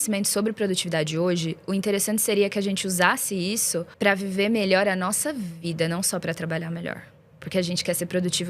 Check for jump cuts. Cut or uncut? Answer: cut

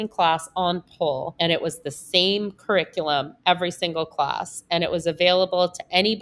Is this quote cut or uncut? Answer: cut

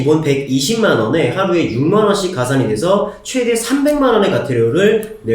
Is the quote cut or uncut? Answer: uncut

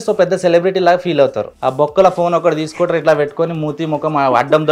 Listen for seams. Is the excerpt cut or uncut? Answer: cut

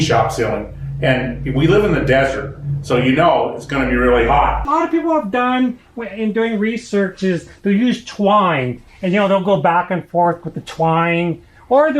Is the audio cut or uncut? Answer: cut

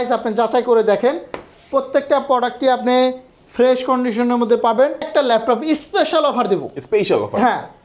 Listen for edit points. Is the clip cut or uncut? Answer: cut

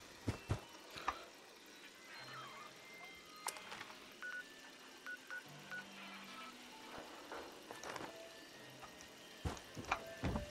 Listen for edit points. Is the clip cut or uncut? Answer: uncut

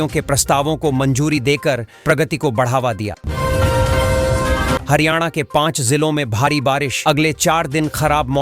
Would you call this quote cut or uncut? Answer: cut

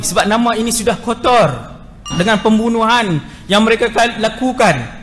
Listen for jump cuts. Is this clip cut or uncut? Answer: cut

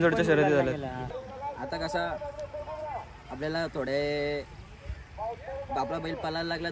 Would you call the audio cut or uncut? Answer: cut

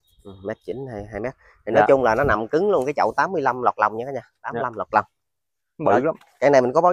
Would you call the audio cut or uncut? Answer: uncut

